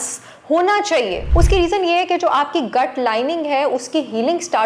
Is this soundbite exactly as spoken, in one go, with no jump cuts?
no; 1 cut; at 1.2 s

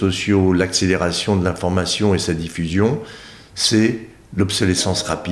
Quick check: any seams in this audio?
no; 0 cuts

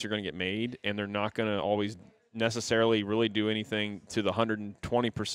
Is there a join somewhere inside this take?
no; 0 cuts

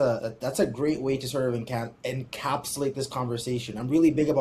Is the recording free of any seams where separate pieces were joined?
yes; 0 cuts

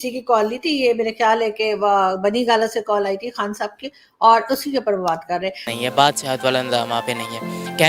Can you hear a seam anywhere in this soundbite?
yes; 1 cut; at 5.7 s

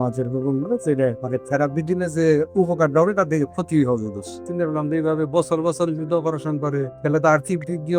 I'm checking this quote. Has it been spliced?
yes; 3 cuts; at 1.2 s, 4.4 s, 6.9 s

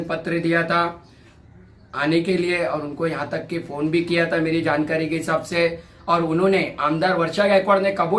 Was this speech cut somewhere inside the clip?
no; 0 cuts

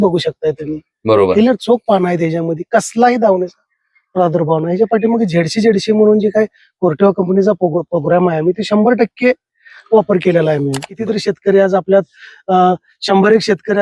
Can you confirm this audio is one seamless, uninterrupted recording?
no; 1 cut; at 10.9 s

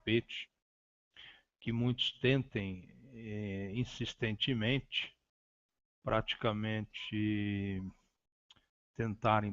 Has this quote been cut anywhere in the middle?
yes; 1 cut; at 6.9 s

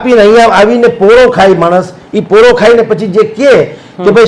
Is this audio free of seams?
yes; 0 cuts

